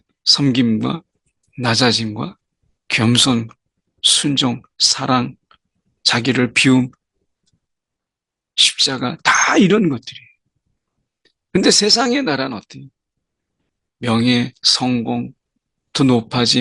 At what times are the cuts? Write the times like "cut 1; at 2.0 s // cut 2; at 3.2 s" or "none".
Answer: none